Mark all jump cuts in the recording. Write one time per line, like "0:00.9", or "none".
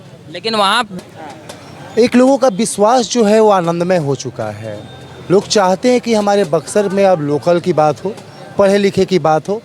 0:00.9